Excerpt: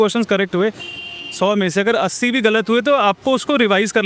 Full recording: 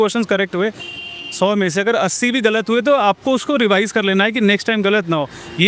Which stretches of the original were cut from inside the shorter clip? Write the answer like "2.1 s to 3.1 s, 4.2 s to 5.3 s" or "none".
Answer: none